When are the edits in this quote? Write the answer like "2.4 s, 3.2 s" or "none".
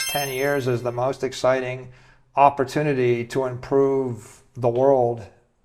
none